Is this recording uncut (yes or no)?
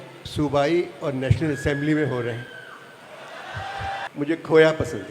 no